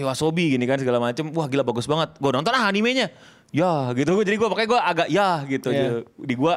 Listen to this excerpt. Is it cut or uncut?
uncut